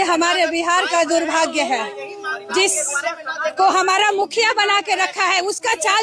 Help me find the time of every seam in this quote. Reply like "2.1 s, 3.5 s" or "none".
none